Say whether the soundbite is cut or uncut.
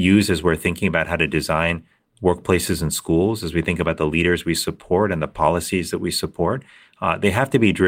uncut